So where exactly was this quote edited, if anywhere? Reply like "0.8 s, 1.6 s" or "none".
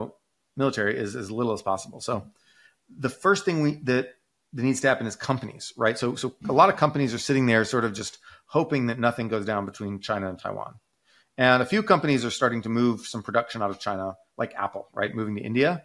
none